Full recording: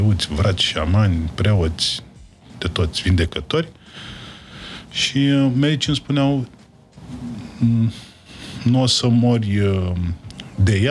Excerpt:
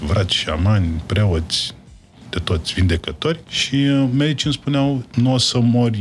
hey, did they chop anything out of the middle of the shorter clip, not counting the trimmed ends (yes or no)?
yes